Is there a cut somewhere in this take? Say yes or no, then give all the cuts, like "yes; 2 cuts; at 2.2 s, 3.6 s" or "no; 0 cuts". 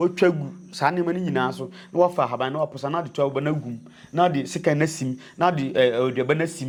no; 0 cuts